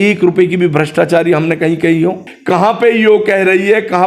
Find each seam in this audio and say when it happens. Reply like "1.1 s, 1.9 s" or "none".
2.3 s